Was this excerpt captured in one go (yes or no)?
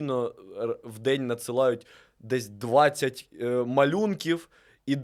yes